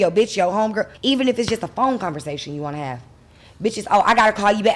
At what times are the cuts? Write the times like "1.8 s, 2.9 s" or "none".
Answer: 0.9 s